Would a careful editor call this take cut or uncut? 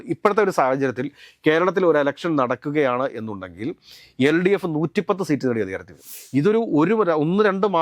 cut